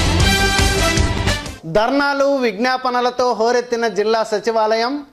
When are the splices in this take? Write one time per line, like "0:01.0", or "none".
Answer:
0:01.2